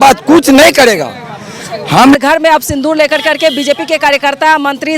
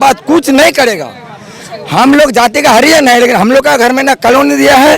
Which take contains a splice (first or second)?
first